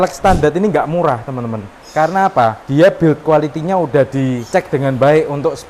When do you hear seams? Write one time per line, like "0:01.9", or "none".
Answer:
0:04.4